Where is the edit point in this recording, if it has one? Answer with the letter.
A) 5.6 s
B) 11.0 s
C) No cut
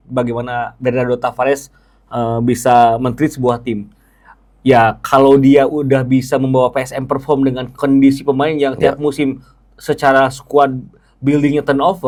C